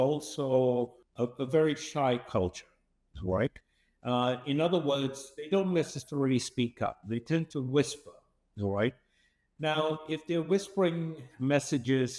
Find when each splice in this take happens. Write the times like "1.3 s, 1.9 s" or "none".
1.0 s